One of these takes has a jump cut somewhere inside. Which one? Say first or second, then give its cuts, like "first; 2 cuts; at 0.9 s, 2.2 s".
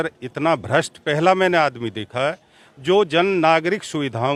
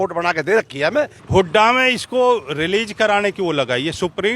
second; 1 cut; at 1.2 s